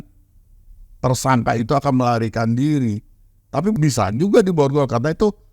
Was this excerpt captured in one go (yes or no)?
no